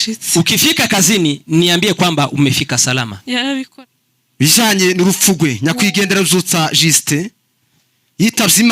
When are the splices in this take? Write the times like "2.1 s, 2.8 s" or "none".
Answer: 3.7 s